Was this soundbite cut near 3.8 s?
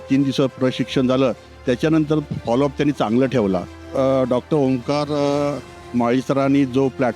yes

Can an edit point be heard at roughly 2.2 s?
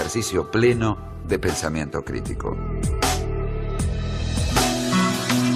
no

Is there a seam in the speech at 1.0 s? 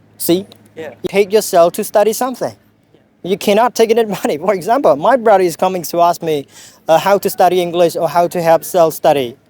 yes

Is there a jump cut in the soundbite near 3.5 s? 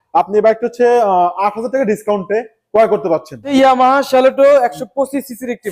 yes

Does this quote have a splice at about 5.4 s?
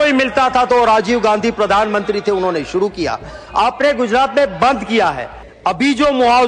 yes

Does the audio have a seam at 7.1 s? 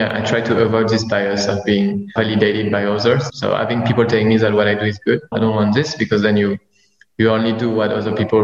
no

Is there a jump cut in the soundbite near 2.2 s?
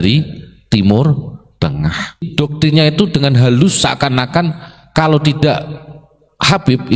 yes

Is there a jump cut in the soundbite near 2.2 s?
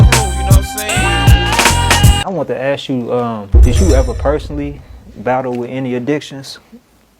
yes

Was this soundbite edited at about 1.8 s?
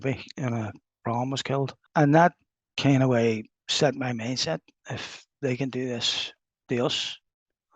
yes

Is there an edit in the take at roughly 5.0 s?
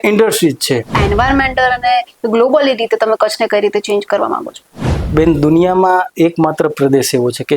no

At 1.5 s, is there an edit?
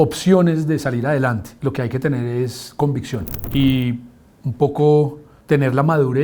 yes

